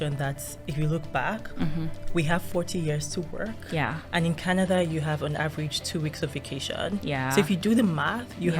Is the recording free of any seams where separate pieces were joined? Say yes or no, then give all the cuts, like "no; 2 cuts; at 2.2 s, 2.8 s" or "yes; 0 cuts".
yes; 0 cuts